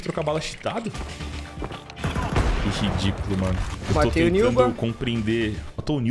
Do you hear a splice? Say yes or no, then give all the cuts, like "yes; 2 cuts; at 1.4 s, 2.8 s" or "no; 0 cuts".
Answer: yes; 2 cuts; at 0.9 s, 3.7 s